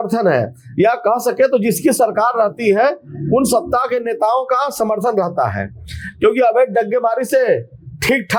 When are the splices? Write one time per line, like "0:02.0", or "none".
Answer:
none